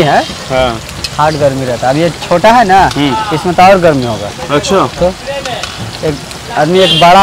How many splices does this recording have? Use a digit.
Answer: 0